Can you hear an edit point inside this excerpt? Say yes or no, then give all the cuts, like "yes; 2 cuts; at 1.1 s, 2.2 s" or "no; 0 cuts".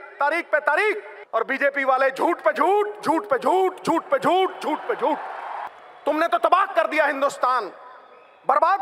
yes; 2 cuts; at 1.1 s, 5.6 s